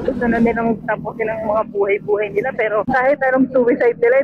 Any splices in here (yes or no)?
no